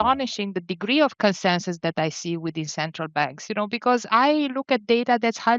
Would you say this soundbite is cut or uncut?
uncut